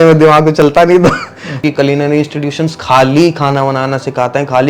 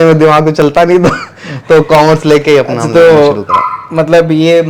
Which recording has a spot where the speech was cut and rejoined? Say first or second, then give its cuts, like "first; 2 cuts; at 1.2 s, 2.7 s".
first; 1 cut; at 1.5 s